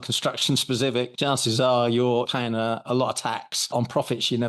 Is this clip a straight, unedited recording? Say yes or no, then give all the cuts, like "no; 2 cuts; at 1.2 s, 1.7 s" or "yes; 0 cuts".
no; 3 cuts; at 1.1 s, 2.3 s, 3.5 s